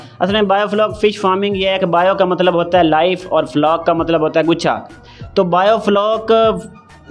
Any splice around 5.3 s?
no; 0 cuts

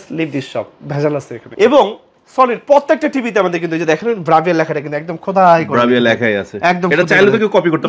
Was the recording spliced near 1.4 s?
yes; 1 cut; at 1.4 s

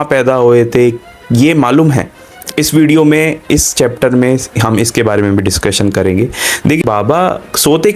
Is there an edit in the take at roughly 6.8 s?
yes; 1 cut; at 6.8 s

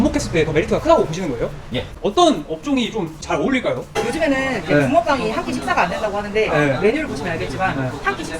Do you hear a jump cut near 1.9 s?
yes; 2 cuts; at 1.9 s, 3.9 s

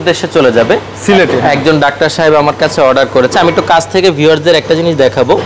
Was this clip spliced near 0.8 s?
no; 0 cuts

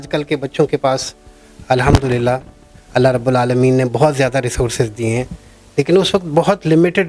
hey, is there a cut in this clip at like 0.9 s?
no; 0 cuts

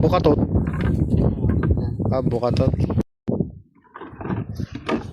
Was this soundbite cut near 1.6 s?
no; 1 cut; at 3.0 s

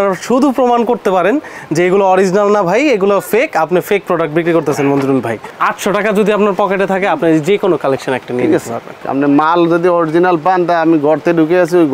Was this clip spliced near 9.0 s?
yes; 2 cuts; at 5.4 s, 9.0 s

